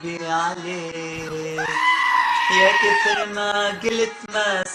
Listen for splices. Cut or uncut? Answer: cut